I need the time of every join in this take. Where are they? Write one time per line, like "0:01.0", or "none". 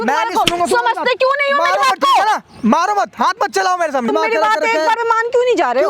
0:04.1